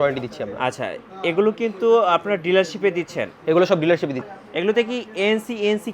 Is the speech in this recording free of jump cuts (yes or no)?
no